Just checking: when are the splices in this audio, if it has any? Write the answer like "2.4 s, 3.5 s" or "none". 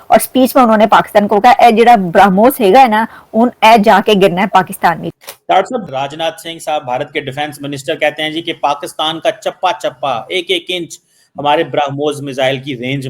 5.1 s